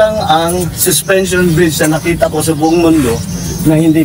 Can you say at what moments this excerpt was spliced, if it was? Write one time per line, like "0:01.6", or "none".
none

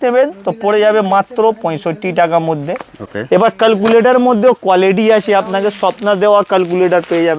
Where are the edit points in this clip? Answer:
none

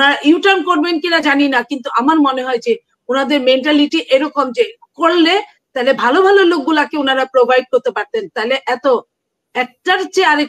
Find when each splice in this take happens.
none

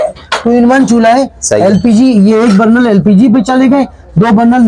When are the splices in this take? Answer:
none

